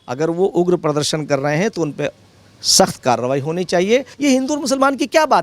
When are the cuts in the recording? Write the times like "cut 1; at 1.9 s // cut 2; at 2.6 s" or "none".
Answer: cut 1; at 4.1 s